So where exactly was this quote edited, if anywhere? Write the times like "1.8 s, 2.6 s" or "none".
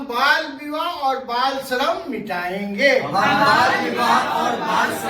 none